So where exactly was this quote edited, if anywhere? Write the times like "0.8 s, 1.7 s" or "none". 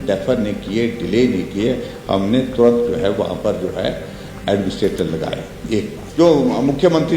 6.0 s

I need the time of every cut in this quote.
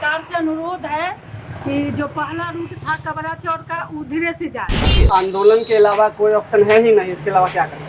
5.0 s

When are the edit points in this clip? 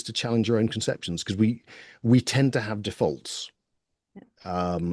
none

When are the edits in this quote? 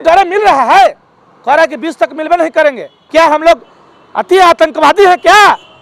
2.9 s

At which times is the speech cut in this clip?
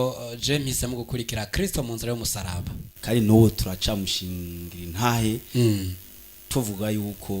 2.9 s

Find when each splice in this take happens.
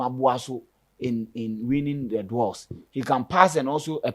none

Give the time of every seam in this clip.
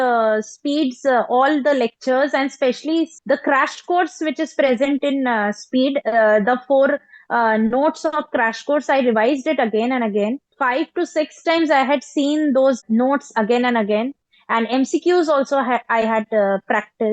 3.1 s, 10.5 s, 12.8 s

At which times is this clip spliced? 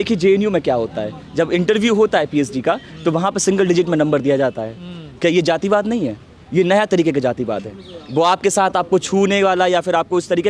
none

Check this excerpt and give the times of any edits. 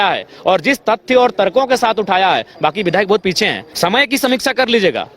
3.6 s

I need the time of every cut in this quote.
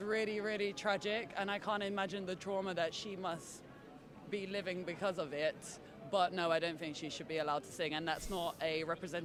none

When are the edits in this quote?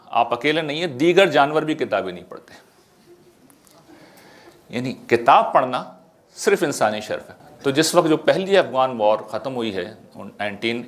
7.3 s

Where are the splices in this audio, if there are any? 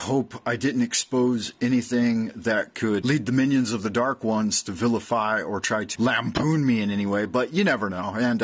3.0 s, 5.9 s

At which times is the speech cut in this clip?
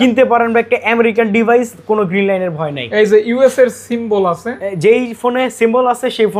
none

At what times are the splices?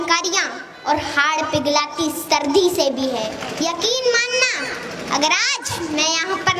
3.4 s

